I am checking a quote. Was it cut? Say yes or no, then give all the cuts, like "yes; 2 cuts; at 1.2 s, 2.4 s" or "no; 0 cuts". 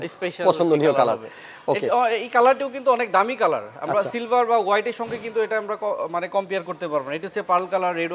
no; 0 cuts